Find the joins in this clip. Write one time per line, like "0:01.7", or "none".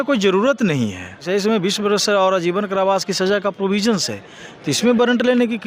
0:01.2